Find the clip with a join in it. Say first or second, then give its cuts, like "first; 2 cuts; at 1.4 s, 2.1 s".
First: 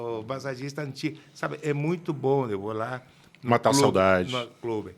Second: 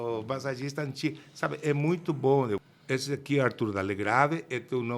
second; 1 cut; at 2.6 s